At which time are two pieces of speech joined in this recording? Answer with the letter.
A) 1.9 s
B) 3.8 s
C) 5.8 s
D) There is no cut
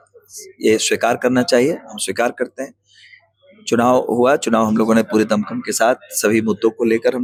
D